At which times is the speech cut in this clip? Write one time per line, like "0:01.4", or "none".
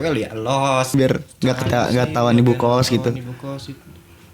0:00.9